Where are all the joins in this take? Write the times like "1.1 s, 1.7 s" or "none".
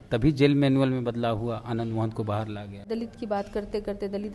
2.9 s